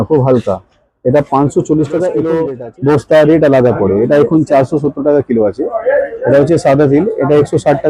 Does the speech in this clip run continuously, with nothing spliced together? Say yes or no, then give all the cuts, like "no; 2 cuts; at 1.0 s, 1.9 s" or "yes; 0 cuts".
no; 1 cut; at 2.4 s